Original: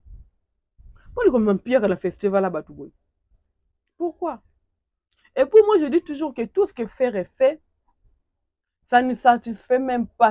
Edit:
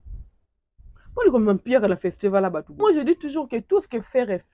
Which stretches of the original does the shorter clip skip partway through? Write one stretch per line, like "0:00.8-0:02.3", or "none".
0:02.8-0:05.7